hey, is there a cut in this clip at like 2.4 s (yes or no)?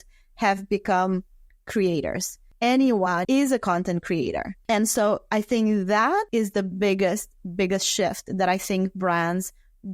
yes